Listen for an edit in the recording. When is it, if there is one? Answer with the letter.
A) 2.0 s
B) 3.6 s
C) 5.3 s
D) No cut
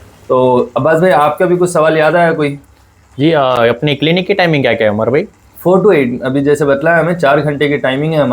D